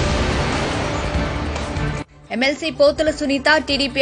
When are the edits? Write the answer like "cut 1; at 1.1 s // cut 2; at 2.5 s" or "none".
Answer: cut 1; at 2.1 s